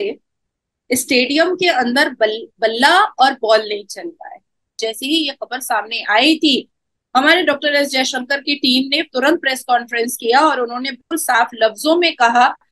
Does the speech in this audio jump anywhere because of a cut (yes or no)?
yes